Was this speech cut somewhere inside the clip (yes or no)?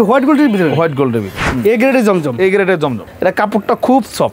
yes